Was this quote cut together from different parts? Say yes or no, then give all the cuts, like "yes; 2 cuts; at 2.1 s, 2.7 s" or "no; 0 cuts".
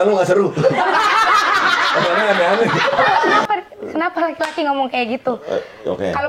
yes; 1 cut; at 3.4 s